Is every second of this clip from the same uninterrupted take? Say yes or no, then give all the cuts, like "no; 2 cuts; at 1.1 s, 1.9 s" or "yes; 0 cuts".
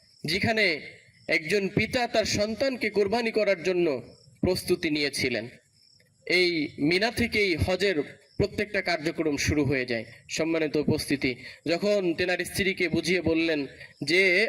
yes; 0 cuts